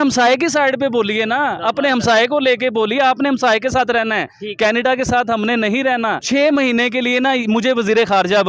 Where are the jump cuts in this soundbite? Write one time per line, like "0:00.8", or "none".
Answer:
0:06.2

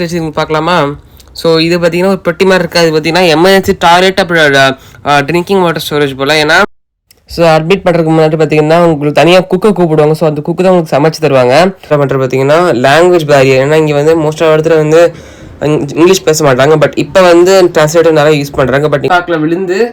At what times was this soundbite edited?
0:06.6
0:11.8
0:19.0

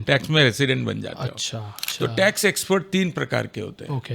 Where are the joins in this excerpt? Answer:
0:01.8

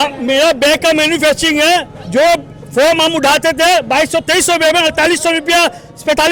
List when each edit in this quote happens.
none

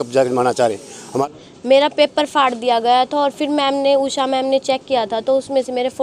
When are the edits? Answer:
0:01.2

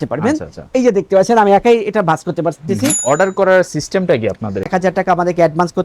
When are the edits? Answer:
0:02.9
0:04.7

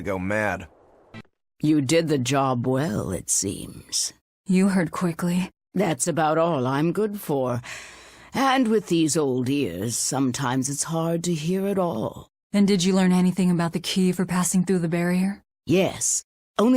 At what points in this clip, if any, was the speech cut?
0:10.5

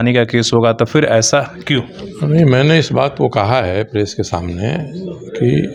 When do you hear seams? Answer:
none

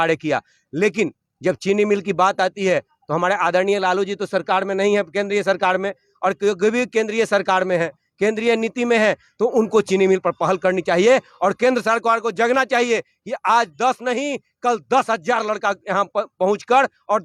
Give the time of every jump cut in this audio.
none

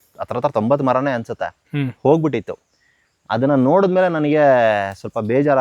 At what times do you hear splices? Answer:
none

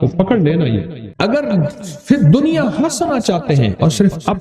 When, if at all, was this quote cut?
0:01.0

